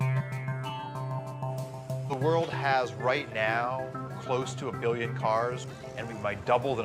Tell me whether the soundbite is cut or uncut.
cut